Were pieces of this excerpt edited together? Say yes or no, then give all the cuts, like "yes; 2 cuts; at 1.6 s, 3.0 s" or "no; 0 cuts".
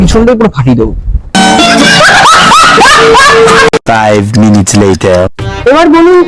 no; 0 cuts